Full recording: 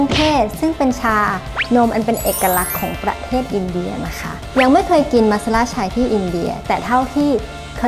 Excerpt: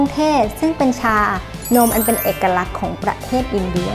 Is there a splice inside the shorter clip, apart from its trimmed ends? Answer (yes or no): no